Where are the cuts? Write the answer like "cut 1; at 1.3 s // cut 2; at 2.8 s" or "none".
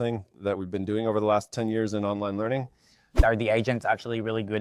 cut 1; at 3.2 s